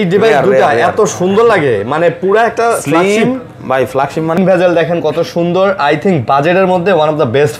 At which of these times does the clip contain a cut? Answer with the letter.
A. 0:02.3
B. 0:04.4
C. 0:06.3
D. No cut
B